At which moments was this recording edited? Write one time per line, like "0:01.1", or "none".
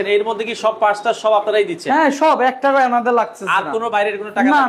none